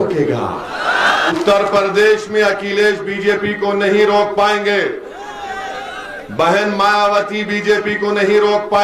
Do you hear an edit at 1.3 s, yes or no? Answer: yes